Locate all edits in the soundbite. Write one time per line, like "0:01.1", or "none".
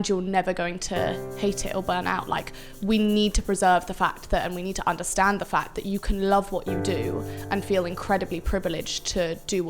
0:01.3